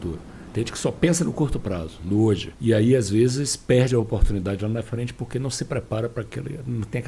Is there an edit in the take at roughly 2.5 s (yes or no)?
yes